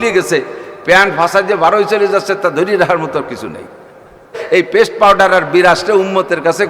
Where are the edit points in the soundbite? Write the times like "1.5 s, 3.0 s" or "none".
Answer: 4.4 s